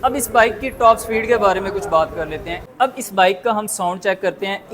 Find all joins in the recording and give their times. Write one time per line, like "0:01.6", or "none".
0:02.6